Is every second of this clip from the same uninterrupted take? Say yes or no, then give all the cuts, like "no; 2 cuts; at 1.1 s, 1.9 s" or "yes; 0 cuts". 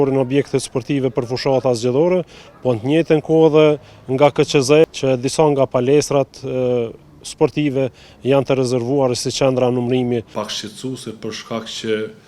no; 2 cuts; at 4.8 s, 10.4 s